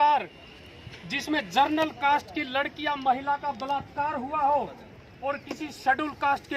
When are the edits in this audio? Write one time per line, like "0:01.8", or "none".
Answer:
none